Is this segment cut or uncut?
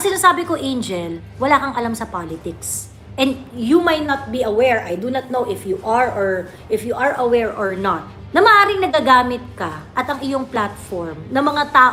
uncut